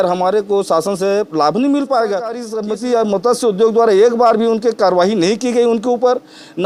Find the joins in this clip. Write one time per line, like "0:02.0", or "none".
0:02.5

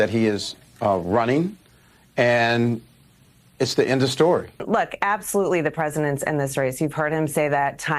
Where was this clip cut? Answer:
0:04.6

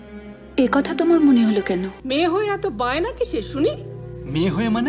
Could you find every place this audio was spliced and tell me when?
0:02.0

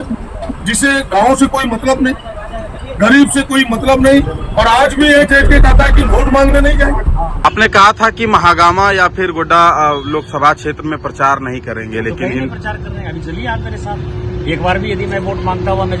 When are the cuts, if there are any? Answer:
none

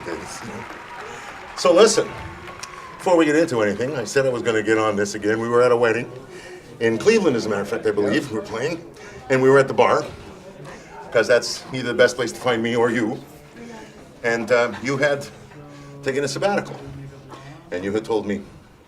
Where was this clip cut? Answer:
0:05.2

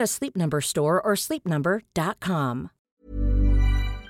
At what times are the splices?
0:02.8

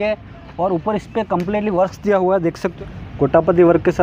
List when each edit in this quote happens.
0:02.7

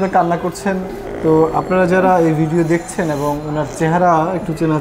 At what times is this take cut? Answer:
0:01.0

